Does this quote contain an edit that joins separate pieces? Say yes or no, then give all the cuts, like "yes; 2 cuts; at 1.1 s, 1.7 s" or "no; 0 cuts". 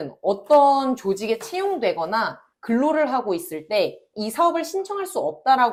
no; 0 cuts